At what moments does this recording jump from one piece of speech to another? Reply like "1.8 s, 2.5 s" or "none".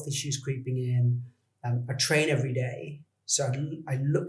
none